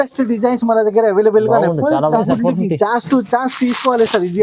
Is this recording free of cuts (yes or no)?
no